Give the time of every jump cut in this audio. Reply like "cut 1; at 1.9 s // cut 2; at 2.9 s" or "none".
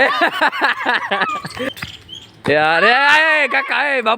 cut 1; at 1.7 s

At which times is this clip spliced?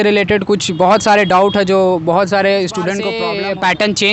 cut 1; at 3.2 s

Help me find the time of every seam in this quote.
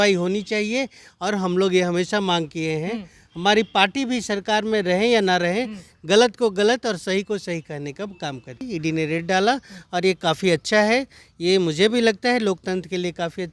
cut 1; at 8.6 s

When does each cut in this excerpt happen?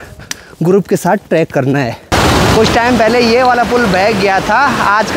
cut 1; at 2.1 s

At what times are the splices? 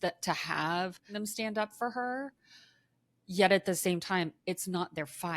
cut 1; at 1.1 s

